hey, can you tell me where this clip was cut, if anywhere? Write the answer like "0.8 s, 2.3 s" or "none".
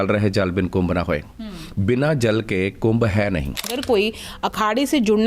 3.8 s